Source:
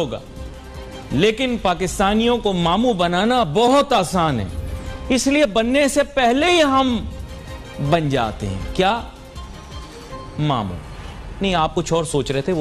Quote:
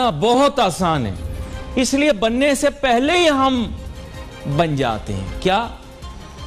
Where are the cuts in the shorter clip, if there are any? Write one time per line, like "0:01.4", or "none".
none